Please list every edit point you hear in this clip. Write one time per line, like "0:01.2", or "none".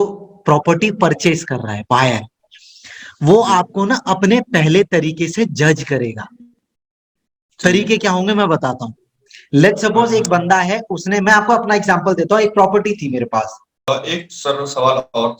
0:13.9